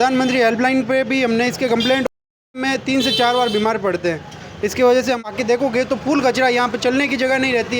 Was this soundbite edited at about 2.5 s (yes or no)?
yes